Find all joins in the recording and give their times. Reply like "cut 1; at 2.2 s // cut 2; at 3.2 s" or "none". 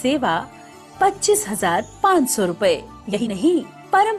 cut 1; at 3.2 s